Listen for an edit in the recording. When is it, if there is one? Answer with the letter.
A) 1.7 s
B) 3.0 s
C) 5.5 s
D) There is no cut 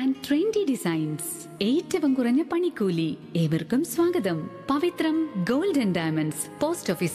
D